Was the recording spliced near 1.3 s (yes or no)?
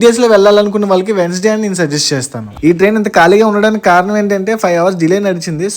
no